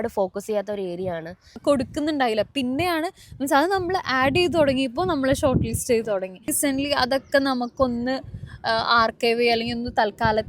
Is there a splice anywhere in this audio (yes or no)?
yes